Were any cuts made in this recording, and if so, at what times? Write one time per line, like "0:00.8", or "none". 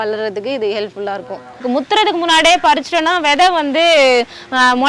0:01.6